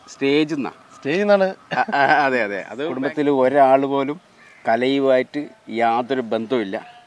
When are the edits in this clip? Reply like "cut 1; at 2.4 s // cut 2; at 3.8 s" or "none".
cut 1; at 2.6 s